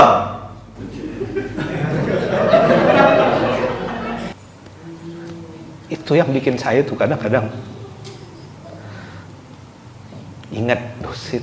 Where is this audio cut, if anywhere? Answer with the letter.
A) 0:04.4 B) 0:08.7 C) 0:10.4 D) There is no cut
A